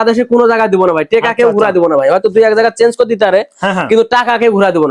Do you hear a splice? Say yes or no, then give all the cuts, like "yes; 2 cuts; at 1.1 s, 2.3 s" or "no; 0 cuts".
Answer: no; 0 cuts